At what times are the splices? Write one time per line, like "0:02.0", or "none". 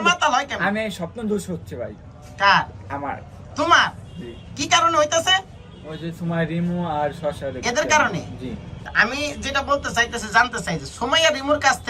0:08.7